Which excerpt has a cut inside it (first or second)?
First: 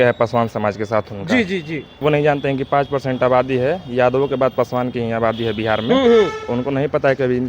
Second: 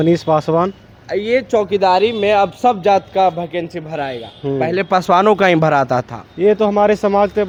first